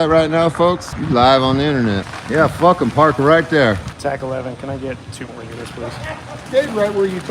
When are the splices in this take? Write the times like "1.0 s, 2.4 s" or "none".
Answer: 0.9 s, 2.1 s, 3.9 s, 6.5 s